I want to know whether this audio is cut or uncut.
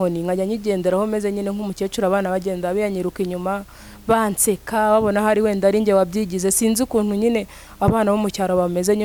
uncut